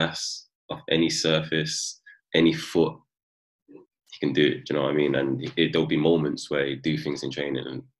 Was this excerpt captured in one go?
yes; 0 cuts

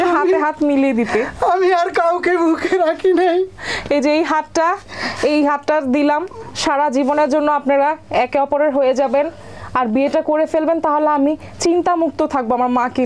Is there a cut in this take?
no; 0 cuts

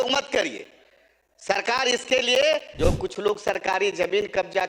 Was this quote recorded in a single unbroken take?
no; 1 cut; at 2.7 s

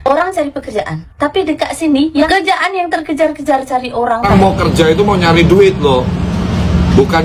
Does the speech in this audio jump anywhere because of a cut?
yes; 2 cuts; at 2.3 s, 4.3 s

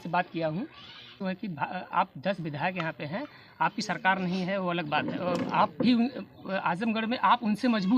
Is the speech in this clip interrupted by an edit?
yes; 1 cut; at 1.1 s

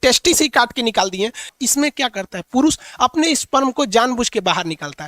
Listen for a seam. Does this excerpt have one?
yes; 1 cut; at 1.5 s

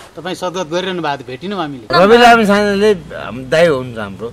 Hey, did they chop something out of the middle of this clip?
yes; 1 cut; at 1.9 s

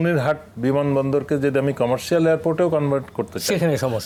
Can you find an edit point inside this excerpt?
no; 0 cuts

